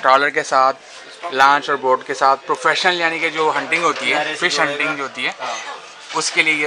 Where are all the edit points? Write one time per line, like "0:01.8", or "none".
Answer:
none